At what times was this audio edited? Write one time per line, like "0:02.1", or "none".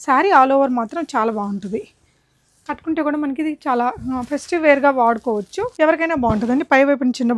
0:05.7